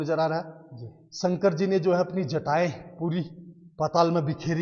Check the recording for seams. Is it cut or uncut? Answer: uncut